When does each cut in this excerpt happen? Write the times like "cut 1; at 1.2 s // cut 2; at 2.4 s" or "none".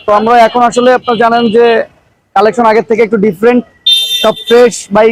none